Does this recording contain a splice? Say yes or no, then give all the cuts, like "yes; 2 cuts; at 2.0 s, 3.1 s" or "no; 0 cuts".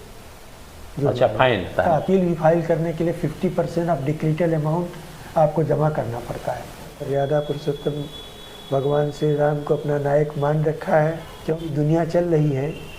yes; 3 cuts; at 1.7 s, 6.9 s, 11.6 s